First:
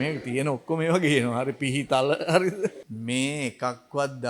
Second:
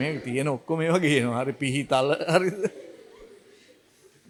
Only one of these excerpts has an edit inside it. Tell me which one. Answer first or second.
first